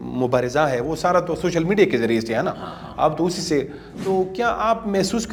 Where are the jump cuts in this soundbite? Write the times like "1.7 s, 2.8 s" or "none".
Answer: none